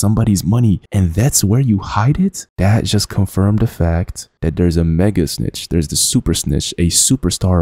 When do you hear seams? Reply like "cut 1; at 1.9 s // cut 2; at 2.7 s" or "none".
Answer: cut 1; at 2.4 s